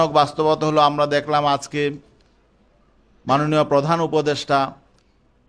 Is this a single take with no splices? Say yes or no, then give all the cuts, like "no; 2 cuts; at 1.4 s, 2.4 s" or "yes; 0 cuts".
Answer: yes; 0 cuts